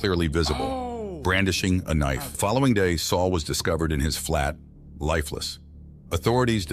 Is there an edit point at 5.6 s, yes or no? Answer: no